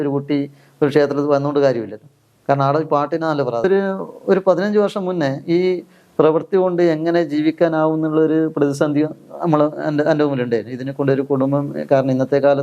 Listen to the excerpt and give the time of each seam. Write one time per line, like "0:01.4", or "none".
0:03.6